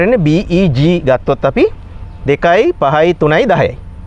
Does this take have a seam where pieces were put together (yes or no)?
no